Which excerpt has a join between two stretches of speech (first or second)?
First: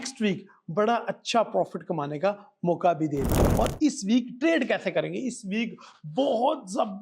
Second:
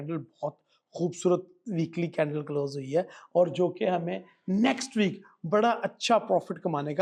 first